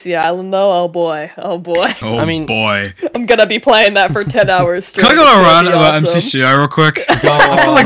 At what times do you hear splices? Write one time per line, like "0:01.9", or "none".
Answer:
none